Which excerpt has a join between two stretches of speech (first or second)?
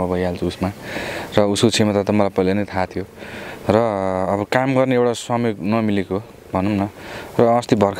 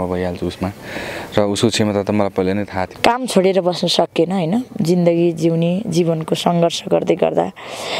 second